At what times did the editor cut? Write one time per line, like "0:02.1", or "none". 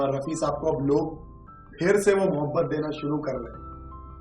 none